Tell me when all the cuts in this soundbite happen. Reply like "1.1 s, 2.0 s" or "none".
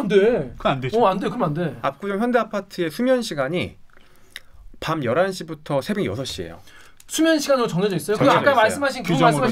none